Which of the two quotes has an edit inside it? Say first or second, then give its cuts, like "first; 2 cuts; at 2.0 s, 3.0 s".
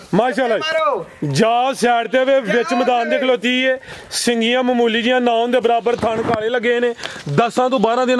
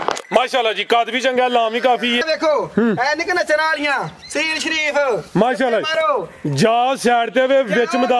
second; 1 cut; at 2.2 s